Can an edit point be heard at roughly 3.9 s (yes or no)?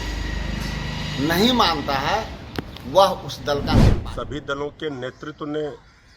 yes